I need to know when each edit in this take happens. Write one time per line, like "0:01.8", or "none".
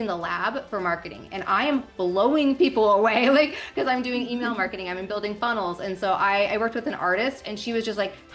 none

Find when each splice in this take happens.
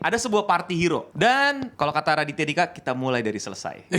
0:01.1
0:01.7

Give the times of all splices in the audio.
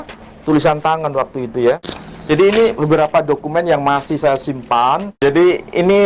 0:01.9
0:05.1

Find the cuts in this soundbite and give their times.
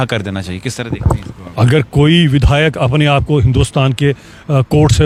none

